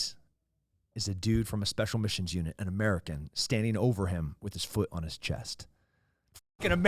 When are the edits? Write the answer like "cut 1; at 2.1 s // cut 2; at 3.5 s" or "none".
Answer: none